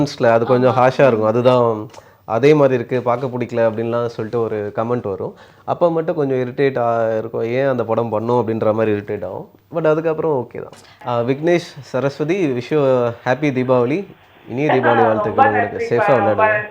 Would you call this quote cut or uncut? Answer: cut